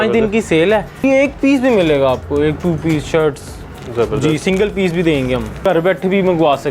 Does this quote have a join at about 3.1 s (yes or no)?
no